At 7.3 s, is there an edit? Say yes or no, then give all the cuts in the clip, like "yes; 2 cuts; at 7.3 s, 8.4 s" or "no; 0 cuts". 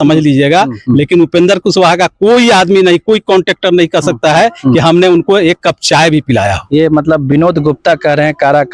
no; 0 cuts